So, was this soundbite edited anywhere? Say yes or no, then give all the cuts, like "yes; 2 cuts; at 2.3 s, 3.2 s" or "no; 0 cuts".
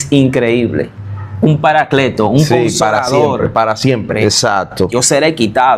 yes; 1 cut; at 4.1 s